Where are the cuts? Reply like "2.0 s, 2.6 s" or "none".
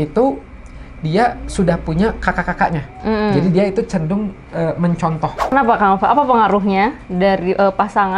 5.5 s